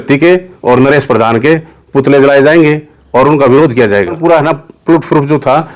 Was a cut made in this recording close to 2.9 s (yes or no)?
no